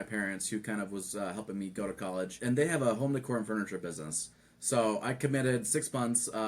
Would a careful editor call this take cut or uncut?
cut